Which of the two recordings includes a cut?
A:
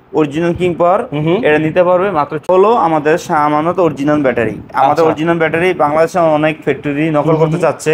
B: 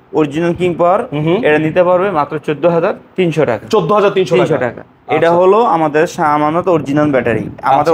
A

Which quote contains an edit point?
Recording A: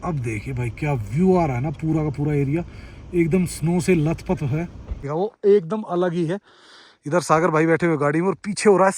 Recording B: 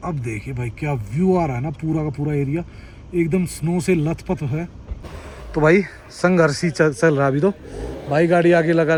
A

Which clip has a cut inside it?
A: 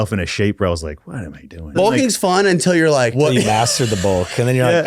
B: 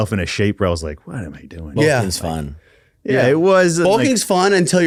A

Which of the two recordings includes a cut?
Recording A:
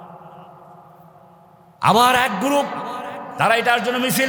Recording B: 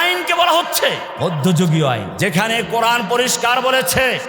B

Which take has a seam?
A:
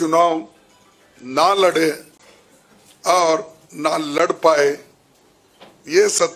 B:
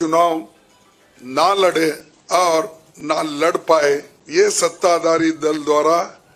B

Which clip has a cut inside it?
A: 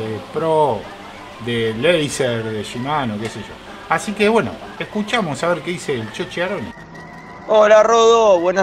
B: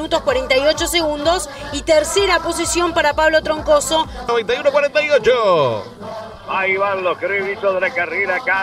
B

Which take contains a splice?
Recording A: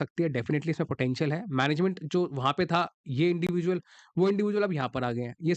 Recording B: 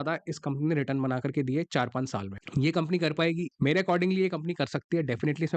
B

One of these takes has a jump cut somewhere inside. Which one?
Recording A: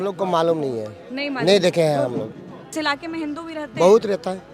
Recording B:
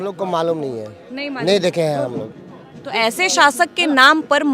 A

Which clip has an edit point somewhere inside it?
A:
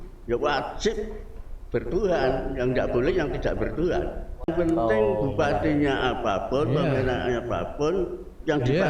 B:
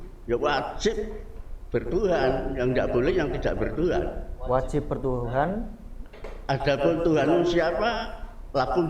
A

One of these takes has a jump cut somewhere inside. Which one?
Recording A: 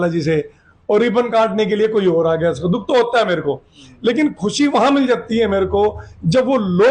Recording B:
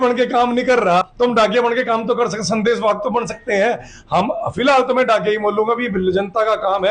B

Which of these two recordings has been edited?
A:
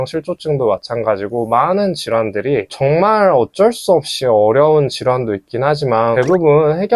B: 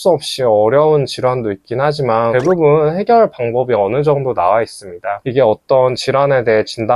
B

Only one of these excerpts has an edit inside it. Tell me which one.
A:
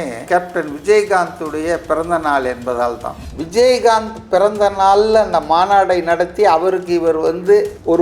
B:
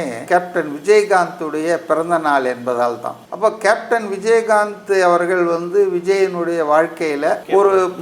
A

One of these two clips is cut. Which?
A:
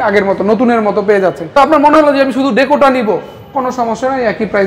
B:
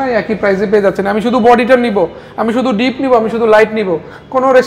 A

